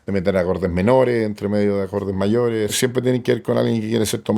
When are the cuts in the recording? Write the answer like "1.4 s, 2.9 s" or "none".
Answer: 2.7 s